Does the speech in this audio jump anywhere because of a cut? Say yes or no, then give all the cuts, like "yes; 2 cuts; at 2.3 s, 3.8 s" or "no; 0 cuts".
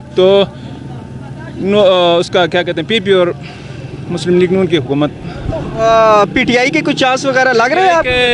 no; 0 cuts